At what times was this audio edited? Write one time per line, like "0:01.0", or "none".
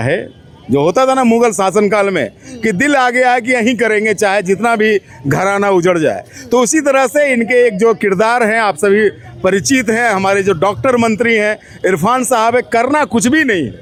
none